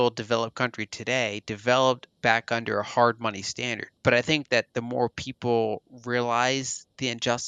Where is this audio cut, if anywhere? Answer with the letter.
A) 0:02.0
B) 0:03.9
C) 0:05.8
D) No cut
B